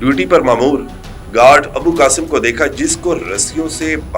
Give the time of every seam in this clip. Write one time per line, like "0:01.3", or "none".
none